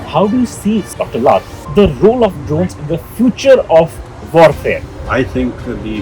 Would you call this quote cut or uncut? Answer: cut